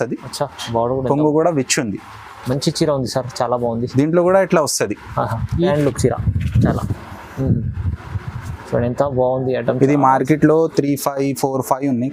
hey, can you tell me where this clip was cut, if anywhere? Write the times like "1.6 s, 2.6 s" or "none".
5.7 s